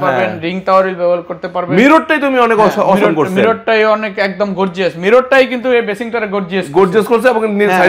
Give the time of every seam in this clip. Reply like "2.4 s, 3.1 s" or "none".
none